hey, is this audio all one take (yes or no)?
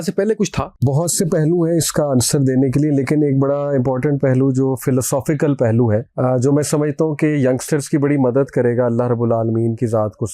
no